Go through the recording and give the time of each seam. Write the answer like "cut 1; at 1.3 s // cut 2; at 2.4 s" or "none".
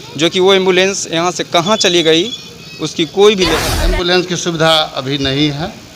cut 1; at 3.7 s